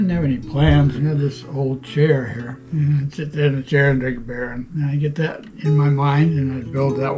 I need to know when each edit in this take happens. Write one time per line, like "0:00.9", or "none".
0:01.0
0:02.6
0:04.7